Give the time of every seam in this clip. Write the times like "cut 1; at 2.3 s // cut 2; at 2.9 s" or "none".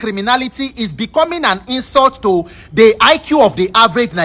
none

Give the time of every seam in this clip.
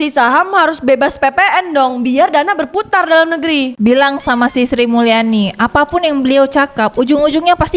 none

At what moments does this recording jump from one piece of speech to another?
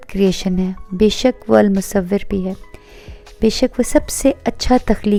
none

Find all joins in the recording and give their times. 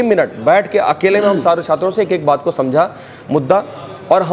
none

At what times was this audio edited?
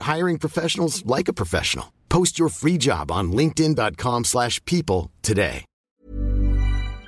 cut 1; at 5.8 s

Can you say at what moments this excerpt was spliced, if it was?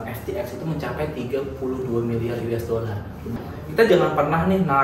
cut 1; at 3.3 s

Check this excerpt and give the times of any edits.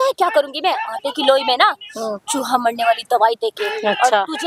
none

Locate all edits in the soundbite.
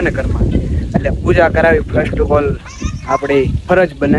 none

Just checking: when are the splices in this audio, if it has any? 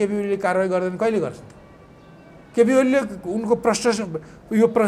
none

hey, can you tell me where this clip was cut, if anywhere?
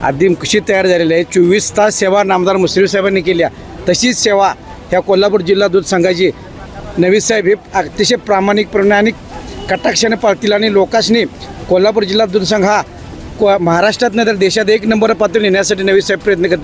none

